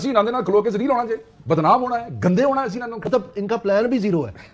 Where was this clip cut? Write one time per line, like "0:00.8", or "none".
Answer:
0:03.0